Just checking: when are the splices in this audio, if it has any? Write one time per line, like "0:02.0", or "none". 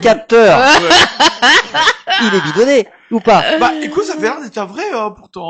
none